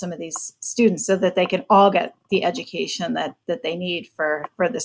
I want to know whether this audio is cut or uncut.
uncut